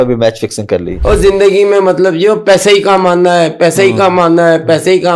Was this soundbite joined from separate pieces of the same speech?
yes; 1 cut; at 0.9 s

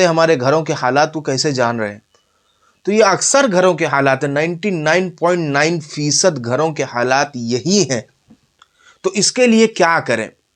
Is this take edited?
no; 0 cuts

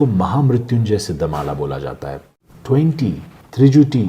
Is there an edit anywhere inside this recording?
yes; 1 cut; at 2.3 s

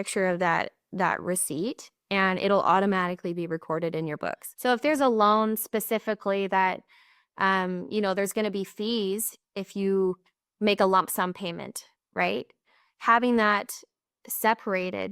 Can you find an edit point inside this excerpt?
yes; 1 cut; at 4.5 s

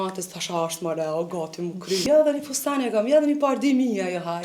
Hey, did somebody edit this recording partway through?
yes; 1 cut; at 2.0 s

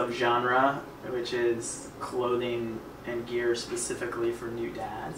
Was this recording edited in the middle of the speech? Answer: no; 0 cuts

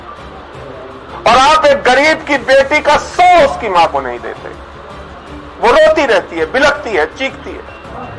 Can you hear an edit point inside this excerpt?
no; 0 cuts

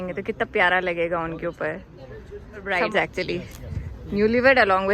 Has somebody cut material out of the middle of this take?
yes; 1 cut; at 2.7 s

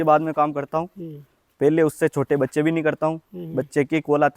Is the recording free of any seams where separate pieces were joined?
yes; 0 cuts

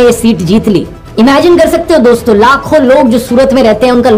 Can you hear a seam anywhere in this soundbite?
no; 0 cuts

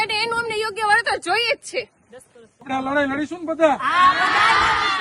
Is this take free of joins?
no; 1 cut; at 2.7 s

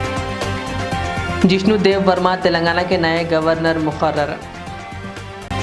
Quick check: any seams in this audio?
no; 0 cuts

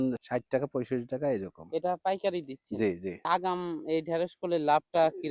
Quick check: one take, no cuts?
yes; 0 cuts

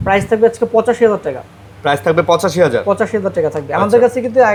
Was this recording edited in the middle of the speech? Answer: no; 0 cuts

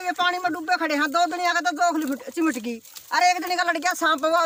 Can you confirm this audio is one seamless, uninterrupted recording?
yes; 0 cuts

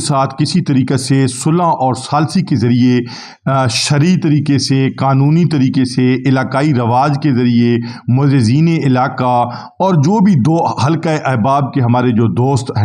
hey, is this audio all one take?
yes; 0 cuts

